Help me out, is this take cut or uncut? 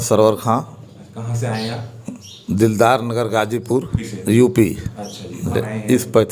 cut